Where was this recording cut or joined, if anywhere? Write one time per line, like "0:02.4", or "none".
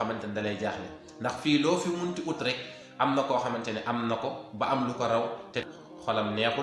0:05.6

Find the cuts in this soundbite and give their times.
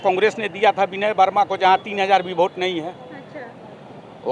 none

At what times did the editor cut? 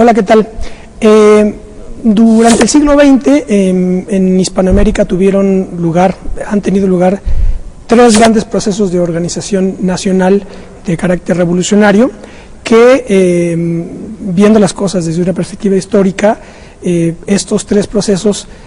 none

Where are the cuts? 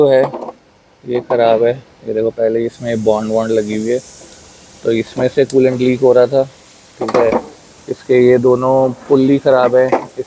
none

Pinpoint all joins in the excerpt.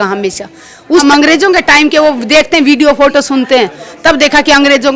0:01.0

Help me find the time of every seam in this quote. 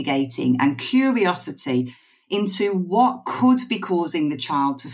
none

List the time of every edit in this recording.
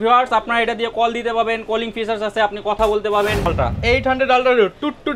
0:03.5

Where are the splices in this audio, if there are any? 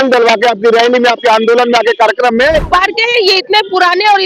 0:02.7

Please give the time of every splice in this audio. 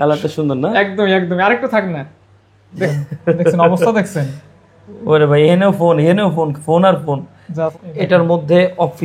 0:02.9
0:07.7

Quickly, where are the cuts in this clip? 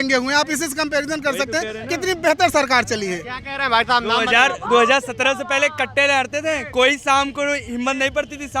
none

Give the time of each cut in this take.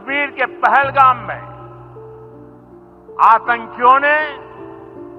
none

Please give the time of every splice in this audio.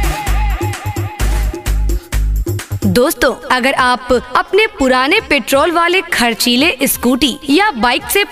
0:02.8

